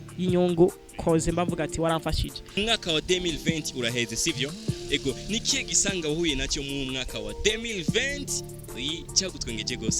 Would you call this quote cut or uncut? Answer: cut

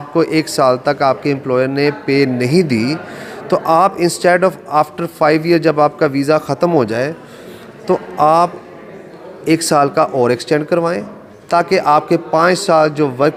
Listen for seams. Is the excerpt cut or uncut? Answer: uncut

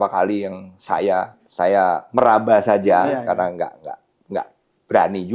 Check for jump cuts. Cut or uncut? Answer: cut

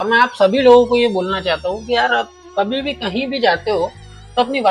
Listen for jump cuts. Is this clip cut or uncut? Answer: uncut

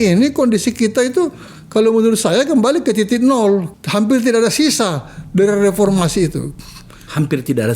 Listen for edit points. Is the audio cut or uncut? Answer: cut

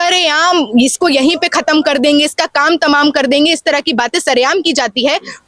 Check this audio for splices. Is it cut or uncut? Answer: uncut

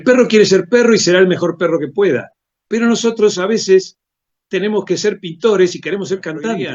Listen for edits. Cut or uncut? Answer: uncut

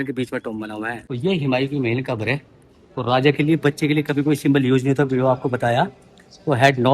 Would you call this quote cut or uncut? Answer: cut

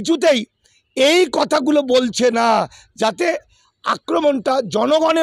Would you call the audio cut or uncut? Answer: uncut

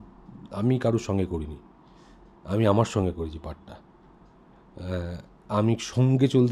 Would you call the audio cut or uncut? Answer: uncut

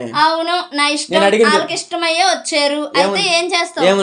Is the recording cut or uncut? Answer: uncut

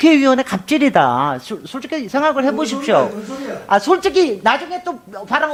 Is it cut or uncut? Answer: uncut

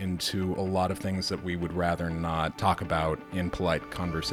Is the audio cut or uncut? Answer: cut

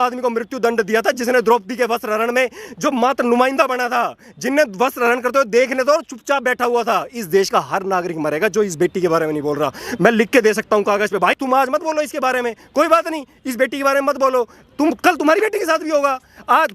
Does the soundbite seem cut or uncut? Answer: uncut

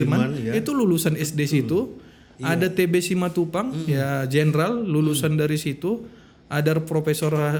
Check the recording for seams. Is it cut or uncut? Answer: uncut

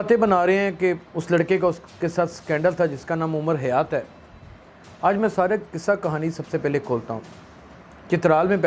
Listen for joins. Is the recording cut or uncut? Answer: uncut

